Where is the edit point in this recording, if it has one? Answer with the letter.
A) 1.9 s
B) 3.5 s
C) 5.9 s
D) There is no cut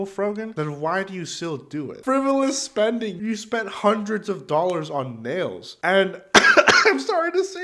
A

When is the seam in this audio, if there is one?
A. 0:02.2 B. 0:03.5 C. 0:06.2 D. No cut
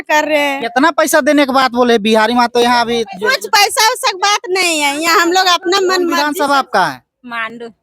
C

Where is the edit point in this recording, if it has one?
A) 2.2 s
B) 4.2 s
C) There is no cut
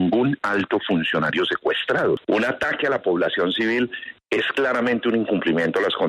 A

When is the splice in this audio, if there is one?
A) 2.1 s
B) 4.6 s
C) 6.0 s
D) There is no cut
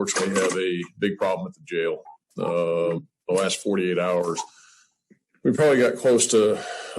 A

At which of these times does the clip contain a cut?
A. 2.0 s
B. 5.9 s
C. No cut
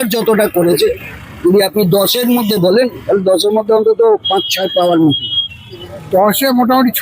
B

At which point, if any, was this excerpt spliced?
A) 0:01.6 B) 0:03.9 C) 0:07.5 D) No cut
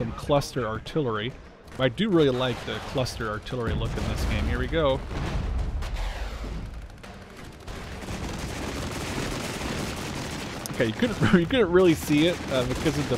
A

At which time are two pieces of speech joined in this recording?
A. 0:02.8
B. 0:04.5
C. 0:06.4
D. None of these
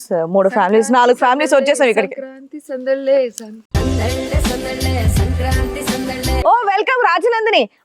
C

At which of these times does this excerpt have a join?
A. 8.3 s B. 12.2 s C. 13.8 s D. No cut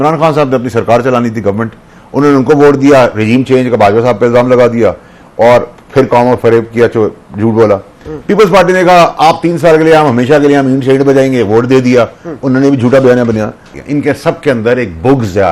C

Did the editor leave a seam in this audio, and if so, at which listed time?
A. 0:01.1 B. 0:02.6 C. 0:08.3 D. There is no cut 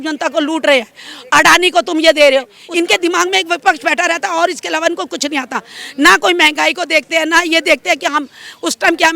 B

